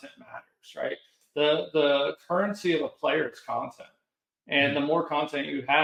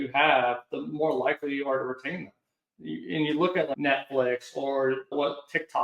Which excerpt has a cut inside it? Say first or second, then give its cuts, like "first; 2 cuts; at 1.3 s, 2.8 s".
second; 1 cut; at 3.7 s